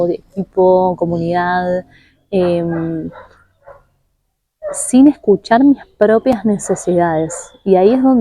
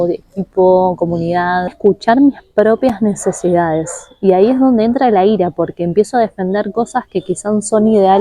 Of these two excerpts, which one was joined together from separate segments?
second; 1 cut; at 1.7 s

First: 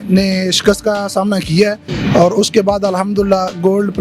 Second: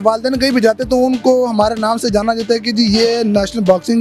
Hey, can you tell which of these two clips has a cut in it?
first; 1 cut; at 1.9 s

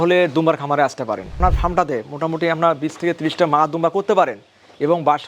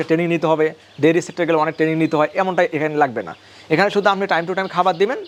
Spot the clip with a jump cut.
first; 1 cut; at 1.3 s

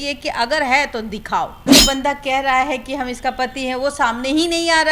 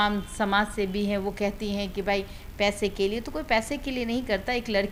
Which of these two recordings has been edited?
first; 1 cut; at 1.7 s

